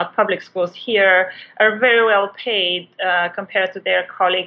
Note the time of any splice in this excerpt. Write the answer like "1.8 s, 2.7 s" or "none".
none

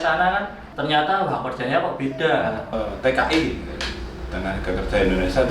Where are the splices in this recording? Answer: 2.7 s

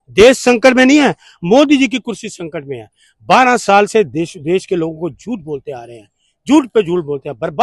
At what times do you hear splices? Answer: none

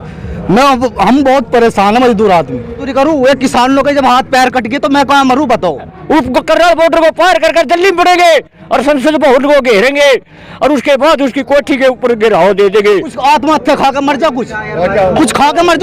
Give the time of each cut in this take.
2.8 s, 5.9 s, 13.1 s

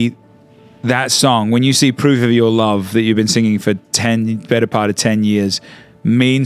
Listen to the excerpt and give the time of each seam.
none

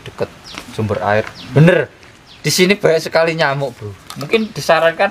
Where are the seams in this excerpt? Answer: 1.4 s

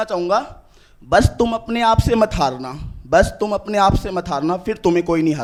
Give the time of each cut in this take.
none

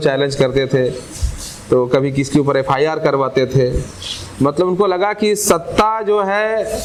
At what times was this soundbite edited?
none

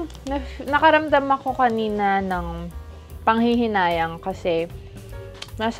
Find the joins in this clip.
none

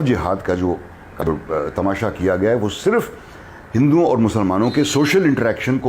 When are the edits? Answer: 1.2 s

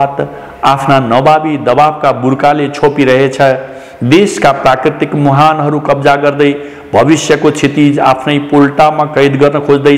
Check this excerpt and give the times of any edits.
none

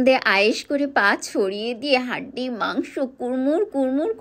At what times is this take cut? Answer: none

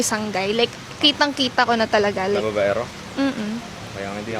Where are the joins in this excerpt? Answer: none

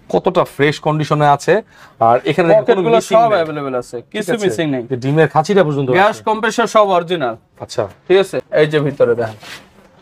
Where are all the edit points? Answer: 8.4 s

